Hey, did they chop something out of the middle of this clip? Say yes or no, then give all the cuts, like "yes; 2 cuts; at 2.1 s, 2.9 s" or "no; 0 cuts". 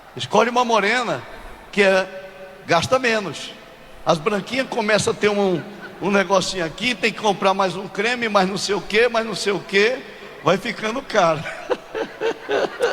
no; 0 cuts